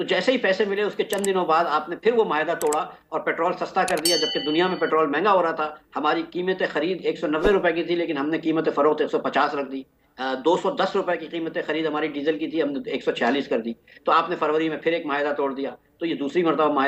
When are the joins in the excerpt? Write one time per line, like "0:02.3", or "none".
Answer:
none